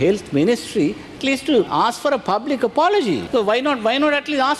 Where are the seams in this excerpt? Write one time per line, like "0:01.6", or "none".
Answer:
0:01.7
0:03.2